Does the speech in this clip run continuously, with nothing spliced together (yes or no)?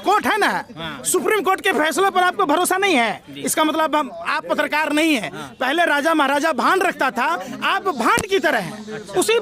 yes